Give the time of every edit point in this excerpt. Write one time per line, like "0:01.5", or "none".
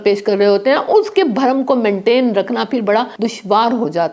0:03.1